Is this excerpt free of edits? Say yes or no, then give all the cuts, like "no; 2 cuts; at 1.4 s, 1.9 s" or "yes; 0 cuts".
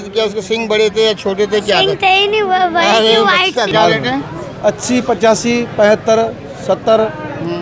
no; 1 cut; at 3.7 s